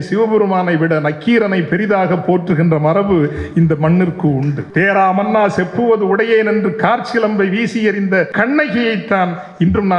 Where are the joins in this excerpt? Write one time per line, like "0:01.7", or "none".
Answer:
0:04.6
0:08.3